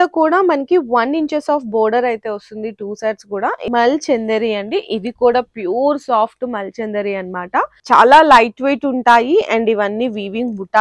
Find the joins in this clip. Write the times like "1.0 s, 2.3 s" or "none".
3.6 s, 7.8 s